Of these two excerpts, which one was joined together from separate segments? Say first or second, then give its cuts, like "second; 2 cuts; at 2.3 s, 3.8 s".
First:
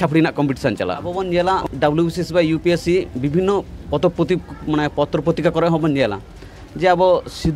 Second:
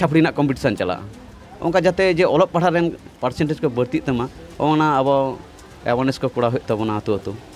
first; 1 cut; at 1.2 s